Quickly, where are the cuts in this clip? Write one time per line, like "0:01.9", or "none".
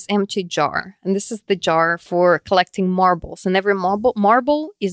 0:02.0